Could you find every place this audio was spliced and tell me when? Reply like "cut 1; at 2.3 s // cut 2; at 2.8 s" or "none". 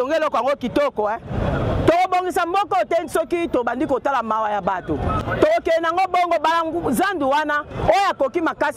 cut 1; at 5.2 s